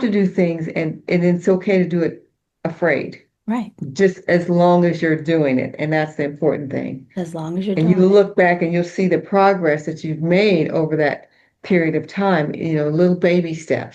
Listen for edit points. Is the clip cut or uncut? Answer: uncut